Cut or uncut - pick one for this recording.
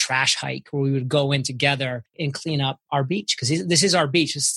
cut